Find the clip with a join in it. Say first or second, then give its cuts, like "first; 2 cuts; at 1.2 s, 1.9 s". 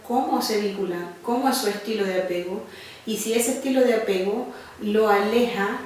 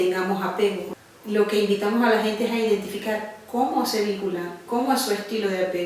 second; 1 cut; at 0.9 s